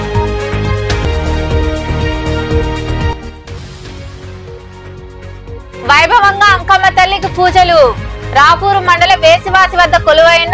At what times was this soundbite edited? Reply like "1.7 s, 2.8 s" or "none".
none